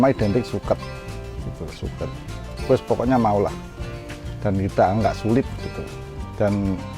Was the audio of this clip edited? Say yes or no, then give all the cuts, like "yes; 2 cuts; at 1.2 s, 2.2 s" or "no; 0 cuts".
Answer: no; 0 cuts